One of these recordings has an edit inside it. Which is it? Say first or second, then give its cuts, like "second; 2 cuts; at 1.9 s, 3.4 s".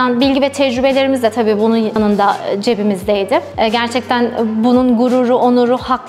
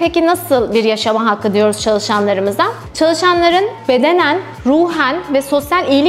first; 2 cuts; at 2.0 s, 3.5 s